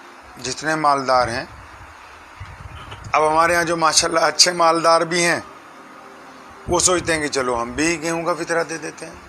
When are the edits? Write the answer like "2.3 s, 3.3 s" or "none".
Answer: 2.9 s